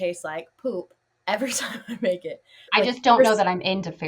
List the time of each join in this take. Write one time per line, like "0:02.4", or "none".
0:02.6